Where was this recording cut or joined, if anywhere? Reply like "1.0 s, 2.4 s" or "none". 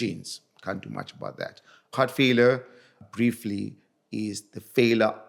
1.9 s, 3.0 s